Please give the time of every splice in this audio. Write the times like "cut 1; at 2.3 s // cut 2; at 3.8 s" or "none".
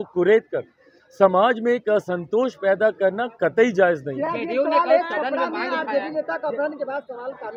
none